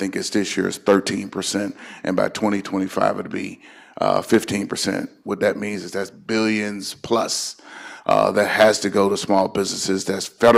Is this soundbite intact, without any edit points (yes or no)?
yes